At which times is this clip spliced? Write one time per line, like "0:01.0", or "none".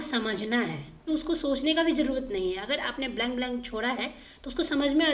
0:01.1